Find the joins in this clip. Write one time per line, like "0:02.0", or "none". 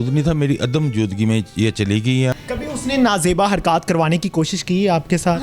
0:02.3